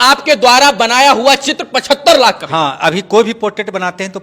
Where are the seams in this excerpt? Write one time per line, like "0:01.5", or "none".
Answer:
none